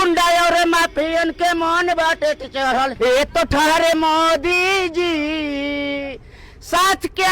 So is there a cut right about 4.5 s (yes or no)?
no